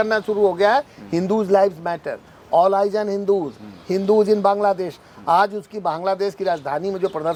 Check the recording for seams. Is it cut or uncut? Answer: uncut